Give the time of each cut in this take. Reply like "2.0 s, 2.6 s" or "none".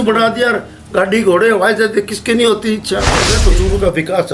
3.3 s